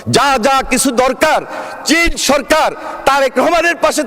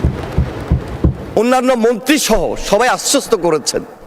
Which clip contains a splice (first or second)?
second